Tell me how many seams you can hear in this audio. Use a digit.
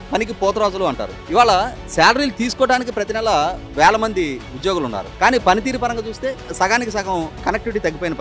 0